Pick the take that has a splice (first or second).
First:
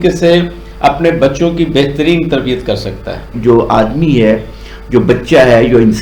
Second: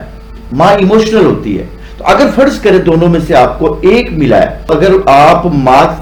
first